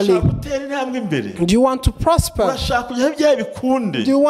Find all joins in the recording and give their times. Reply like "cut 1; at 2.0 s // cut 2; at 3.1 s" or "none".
none